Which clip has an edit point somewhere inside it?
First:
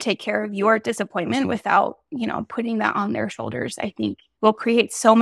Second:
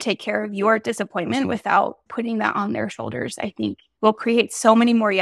second; 1 cut; at 2.1 s

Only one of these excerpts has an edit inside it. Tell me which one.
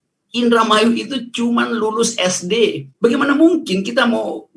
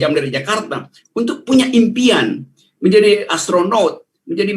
first; 1 cut; at 2.8 s

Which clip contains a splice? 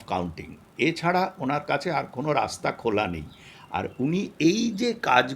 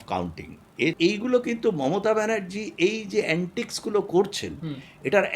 second; 1 cut; at 1.0 s

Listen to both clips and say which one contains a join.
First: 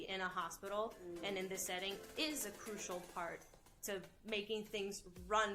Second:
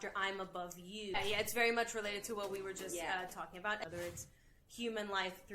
second; 2 cuts; at 1.2 s, 3.8 s

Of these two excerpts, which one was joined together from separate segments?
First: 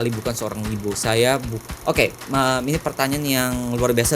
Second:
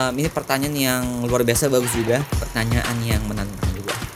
first; 1 cut; at 1.6 s

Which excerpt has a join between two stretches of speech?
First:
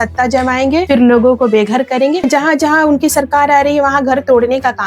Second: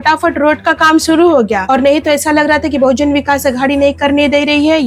first; 1 cut; at 2.2 s

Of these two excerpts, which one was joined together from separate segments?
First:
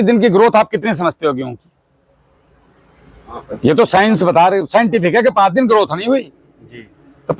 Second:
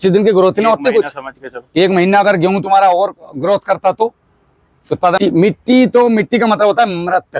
second; 1 cut; at 5.2 s

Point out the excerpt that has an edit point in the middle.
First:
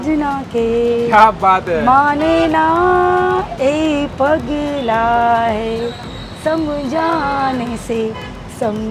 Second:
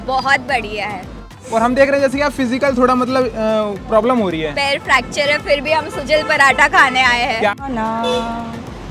second; 2 cuts; at 1.4 s, 7.5 s

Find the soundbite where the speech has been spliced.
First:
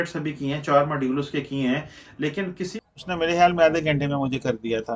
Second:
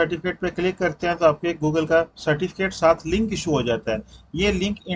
first; 1 cut; at 2.7 s

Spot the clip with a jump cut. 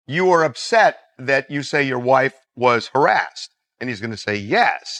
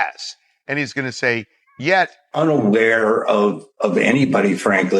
second; 1 cut; at 2.2 s

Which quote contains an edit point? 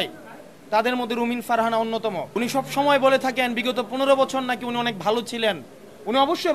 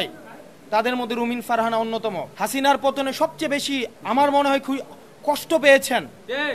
second; 1 cut; at 2.2 s

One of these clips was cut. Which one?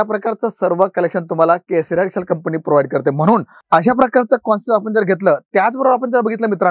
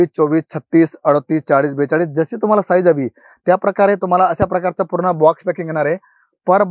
first; 1 cut; at 3.6 s

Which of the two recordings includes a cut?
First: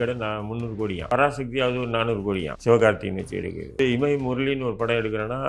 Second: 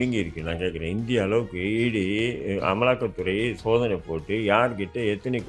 first; 3 cuts; at 1.1 s, 2.5 s, 3.8 s

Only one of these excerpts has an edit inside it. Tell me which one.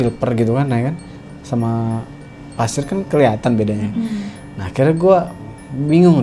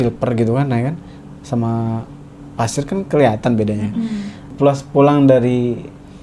second; 1 cut; at 4.5 s

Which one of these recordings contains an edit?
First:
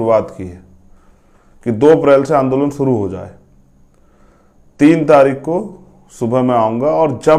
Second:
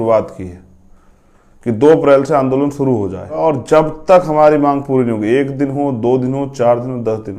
second; 1 cut; at 3.3 s

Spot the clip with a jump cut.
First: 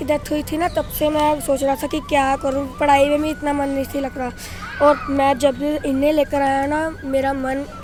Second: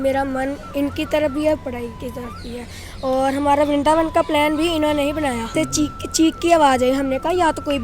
second; 1 cut; at 5.5 s

